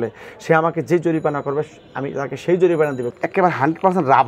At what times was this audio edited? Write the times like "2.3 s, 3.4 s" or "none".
3.2 s